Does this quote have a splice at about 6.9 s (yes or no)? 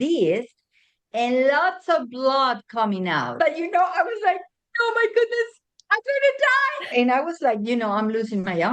yes